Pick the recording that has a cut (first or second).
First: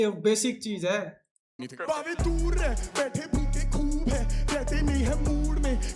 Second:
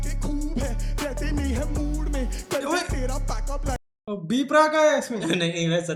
first